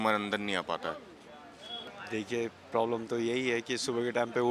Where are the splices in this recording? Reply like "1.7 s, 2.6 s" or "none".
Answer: 1.9 s